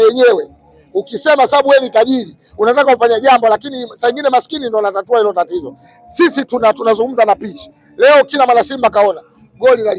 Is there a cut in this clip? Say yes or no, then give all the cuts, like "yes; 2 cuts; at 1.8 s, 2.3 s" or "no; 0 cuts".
no; 0 cuts